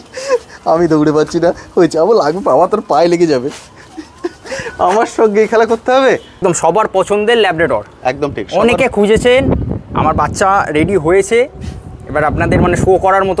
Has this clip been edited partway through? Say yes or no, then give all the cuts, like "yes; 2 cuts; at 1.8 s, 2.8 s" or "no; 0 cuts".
yes; 1 cut; at 6.3 s